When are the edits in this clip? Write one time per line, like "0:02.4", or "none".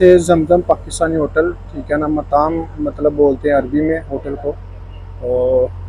none